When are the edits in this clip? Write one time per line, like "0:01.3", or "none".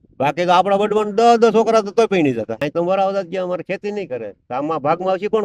0:02.6